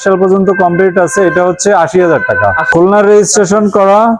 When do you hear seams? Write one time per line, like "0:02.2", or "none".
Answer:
0:02.7